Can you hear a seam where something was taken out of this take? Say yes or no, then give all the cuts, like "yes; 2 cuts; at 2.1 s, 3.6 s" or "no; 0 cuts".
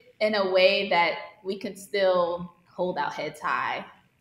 yes; 1 cut; at 2.6 s